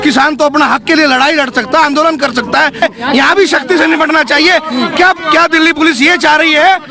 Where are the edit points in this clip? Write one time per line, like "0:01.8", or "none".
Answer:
0:02.8